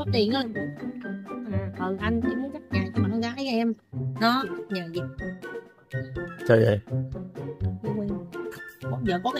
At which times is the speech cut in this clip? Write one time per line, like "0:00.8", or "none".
0:04.6